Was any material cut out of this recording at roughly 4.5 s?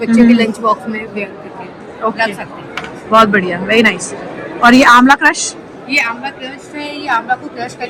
no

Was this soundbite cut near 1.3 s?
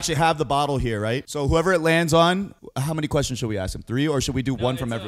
yes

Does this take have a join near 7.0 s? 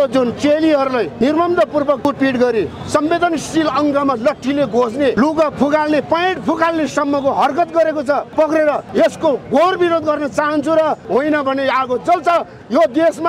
no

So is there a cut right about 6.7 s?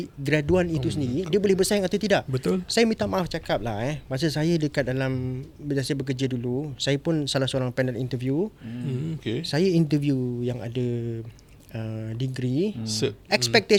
no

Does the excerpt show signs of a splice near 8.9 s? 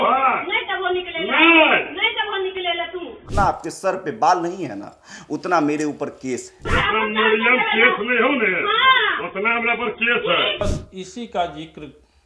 no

